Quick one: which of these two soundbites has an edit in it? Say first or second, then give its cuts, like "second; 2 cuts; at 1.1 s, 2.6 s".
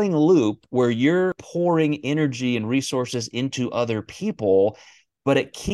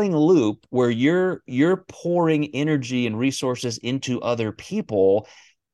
first; 1 cut; at 1.4 s